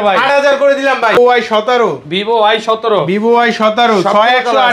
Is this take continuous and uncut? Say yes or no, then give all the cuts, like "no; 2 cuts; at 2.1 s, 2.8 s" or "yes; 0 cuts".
no; 1 cut; at 1.2 s